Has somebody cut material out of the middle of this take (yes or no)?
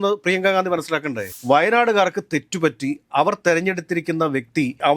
yes